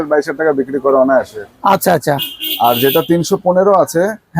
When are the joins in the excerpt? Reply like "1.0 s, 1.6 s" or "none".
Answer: none